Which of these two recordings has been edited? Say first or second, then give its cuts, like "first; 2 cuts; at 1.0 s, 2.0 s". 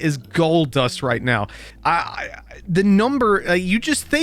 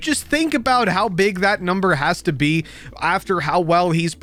first; 1 cut; at 1.6 s